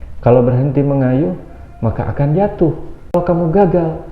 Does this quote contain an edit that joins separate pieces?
yes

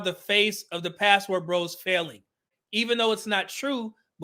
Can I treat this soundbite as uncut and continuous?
yes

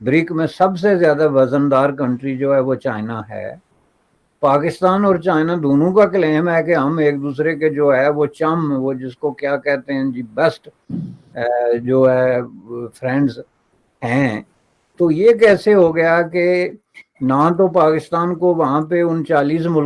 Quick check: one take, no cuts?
yes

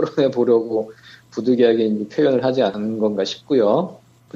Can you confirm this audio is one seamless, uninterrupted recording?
yes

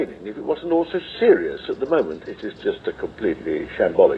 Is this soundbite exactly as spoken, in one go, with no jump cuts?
yes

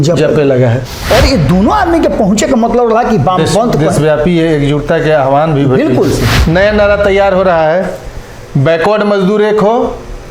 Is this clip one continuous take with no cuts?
no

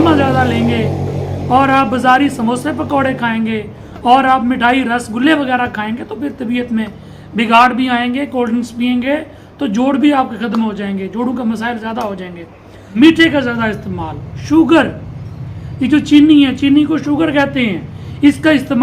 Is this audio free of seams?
no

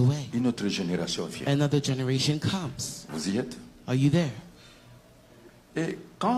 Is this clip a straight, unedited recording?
yes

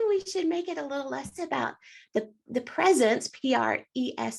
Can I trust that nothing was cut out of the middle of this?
yes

